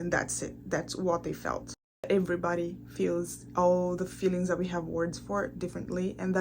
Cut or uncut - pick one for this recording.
cut